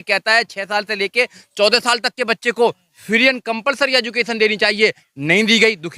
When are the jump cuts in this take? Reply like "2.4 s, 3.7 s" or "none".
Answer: none